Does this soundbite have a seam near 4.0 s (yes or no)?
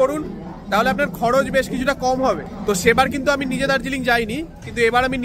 no